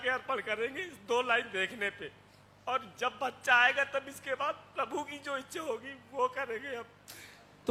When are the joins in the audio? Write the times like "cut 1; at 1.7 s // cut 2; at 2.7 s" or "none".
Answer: none